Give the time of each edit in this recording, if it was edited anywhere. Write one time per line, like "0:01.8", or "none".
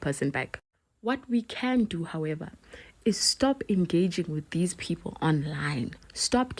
0:01.2